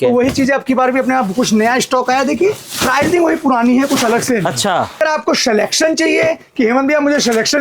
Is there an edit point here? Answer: yes; 1 cut; at 5.0 s

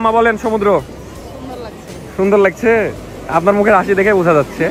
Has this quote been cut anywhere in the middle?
no; 0 cuts

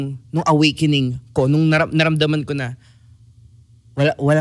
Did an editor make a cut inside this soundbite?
no; 0 cuts

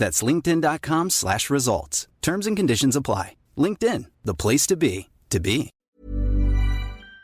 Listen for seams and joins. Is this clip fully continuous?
no; 1 cut; at 5.9 s

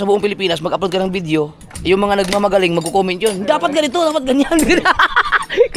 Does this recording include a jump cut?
no; 0 cuts

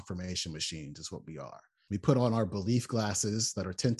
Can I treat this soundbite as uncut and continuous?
no; 1 cut; at 1.8 s

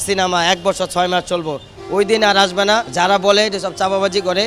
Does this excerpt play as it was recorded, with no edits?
no; 1 cut; at 2.9 s

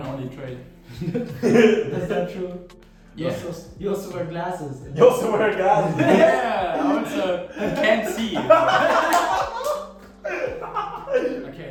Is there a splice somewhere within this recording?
no; 0 cuts

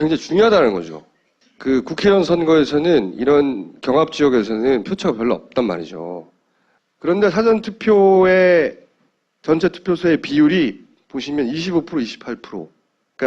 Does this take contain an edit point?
yes; 1 cut; at 8.7 s

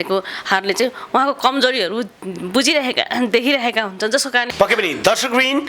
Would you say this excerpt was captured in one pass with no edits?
yes; 0 cuts

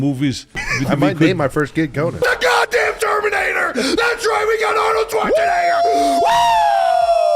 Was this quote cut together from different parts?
yes; 1 cut; at 2.1 s

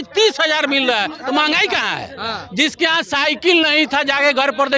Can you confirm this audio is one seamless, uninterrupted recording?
yes; 0 cuts

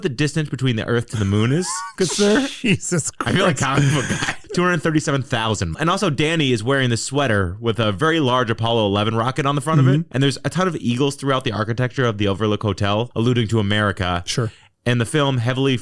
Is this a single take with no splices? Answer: no; 3 cuts; at 4.5 s, 5.7 s, 10.1 s

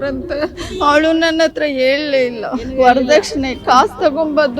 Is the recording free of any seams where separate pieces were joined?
no; 1 cut; at 2.7 s

